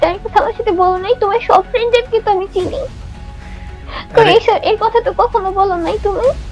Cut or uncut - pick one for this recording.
uncut